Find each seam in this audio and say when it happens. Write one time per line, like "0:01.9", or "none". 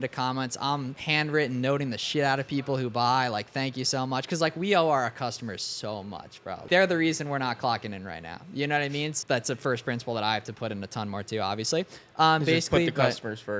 0:01.0
0:06.7
0:09.2